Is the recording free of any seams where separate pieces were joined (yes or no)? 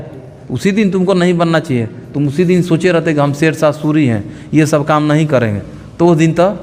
yes